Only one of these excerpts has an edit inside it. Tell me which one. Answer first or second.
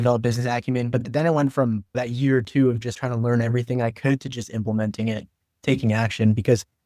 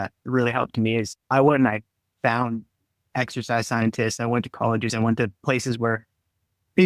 first